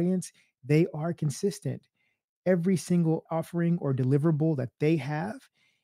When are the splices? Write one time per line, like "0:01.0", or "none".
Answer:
0:03.2